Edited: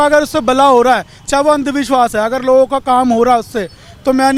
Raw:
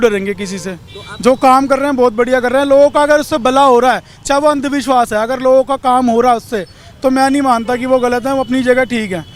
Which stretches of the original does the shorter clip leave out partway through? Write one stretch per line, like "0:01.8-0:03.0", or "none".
none